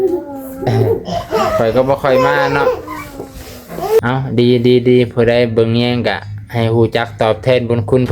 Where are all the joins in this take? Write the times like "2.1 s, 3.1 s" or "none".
4.0 s

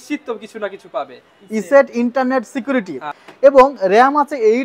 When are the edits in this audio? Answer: 3.2 s

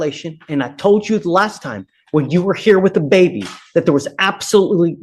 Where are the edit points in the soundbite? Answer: none

